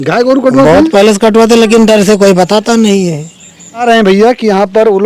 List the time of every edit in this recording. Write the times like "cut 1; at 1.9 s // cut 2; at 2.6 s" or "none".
cut 1; at 3.8 s